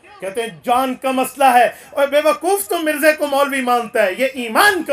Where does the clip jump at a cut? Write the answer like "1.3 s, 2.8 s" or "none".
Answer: none